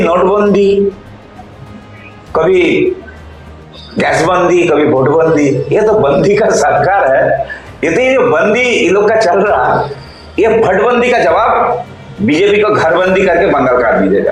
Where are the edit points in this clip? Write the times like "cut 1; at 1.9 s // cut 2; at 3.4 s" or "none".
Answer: none